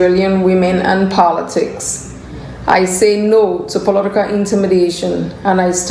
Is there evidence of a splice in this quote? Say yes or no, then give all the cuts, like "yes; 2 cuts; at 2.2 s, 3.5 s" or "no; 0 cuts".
no; 0 cuts